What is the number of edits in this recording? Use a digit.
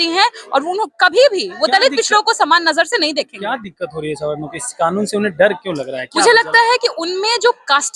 0